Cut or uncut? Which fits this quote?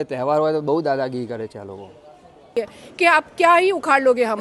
cut